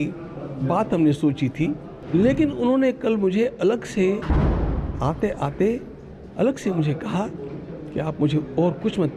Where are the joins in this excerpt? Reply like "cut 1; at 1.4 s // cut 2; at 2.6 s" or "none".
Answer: cut 1; at 1.9 s